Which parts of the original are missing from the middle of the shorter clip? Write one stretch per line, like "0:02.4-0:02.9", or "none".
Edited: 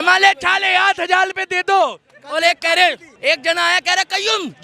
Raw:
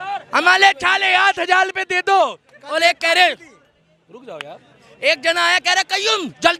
0:03.5-0:04.9